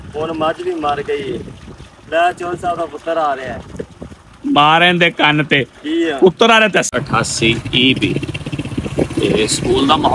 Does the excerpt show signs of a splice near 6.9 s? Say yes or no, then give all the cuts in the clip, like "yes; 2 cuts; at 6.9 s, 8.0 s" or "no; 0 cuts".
yes; 1 cut; at 6.9 s